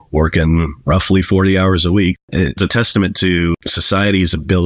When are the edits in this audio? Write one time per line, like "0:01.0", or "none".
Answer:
0:02.2
0:03.7